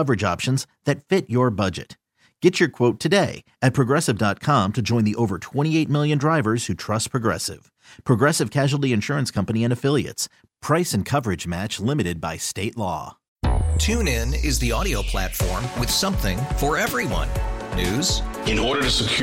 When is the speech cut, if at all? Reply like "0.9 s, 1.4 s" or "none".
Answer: 13.2 s